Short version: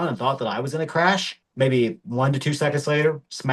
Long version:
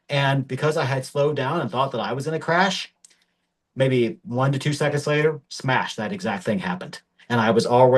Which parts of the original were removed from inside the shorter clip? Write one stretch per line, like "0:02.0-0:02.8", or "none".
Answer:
0:02.9-0:03.6